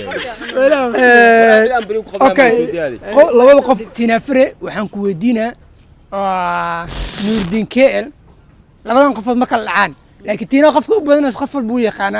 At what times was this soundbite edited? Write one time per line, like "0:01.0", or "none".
0:03.9